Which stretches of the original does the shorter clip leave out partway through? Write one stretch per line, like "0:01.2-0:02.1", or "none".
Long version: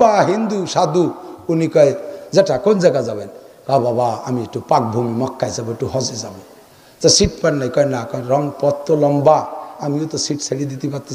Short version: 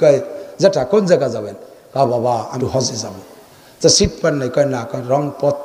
0:04.3-0:05.8